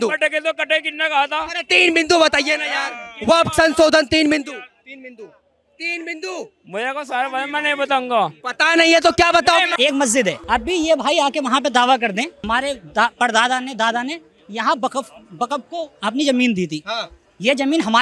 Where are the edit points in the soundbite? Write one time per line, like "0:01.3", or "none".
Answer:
0:09.9
0:12.4